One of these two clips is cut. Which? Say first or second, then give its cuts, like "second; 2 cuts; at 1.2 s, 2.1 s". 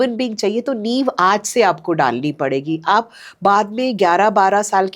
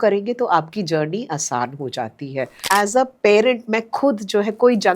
second; 1 cut; at 2.6 s